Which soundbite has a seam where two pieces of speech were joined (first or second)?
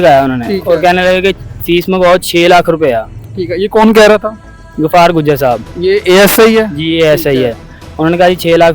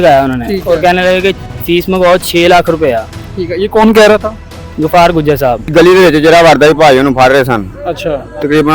second